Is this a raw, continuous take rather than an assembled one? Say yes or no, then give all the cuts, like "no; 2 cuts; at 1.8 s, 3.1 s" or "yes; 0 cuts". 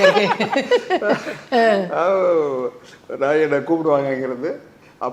yes; 0 cuts